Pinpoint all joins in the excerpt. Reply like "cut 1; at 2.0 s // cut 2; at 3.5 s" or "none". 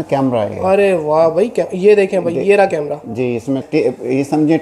cut 1; at 3.6 s